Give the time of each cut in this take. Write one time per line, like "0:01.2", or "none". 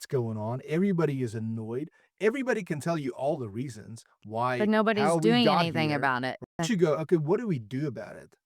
0:06.5